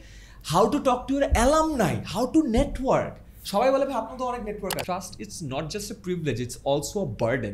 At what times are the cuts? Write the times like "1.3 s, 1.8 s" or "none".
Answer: 4.8 s